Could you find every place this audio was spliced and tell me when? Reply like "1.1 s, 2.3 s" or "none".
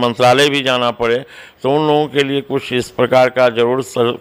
none